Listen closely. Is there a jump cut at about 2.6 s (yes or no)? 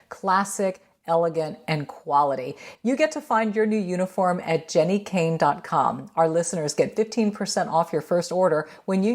yes